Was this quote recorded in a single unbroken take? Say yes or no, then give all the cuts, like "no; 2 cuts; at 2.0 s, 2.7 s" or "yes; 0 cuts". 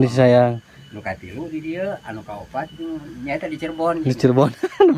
yes; 0 cuts